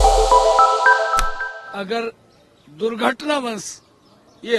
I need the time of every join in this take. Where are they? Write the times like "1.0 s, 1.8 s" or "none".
1.4 s